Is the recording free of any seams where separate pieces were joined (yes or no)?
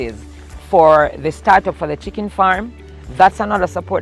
yes